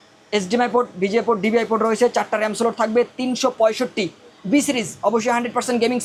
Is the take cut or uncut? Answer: uncut